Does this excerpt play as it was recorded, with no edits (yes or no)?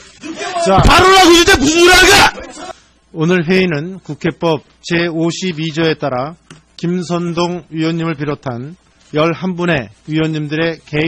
no